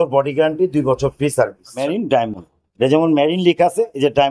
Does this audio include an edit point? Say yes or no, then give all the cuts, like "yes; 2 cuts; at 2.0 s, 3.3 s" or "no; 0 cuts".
yes; 1 cut; at 1.9 s